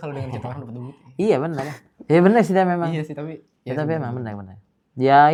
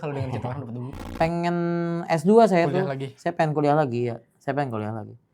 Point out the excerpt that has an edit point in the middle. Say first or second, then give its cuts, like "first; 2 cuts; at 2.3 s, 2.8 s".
second; 1 cut; at 1.0 s